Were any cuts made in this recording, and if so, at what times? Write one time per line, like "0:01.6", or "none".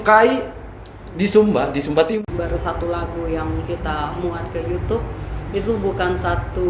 0:02.1